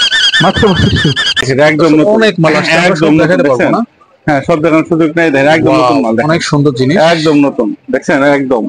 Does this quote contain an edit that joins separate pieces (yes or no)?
yes